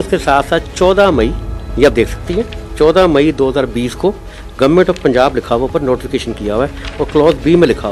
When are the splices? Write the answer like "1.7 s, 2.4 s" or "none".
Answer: none